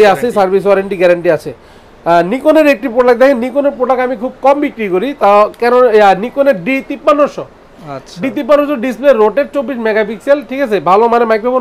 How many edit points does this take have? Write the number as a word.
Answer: zero